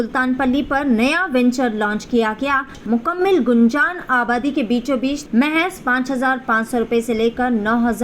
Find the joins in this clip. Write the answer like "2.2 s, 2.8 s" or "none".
2.8 s, 5.2 s